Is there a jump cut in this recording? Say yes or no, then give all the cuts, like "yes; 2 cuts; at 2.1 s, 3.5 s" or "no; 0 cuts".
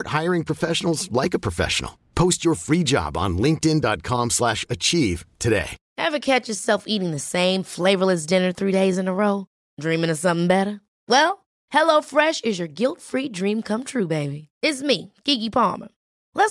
yes; 1 cut; at 5.8 s